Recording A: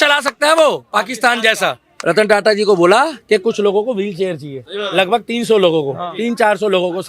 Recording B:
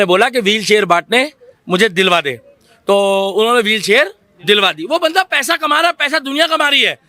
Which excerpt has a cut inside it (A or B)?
A